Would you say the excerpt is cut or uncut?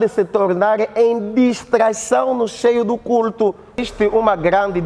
cut